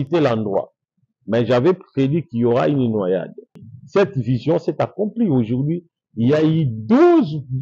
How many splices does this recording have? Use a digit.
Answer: 1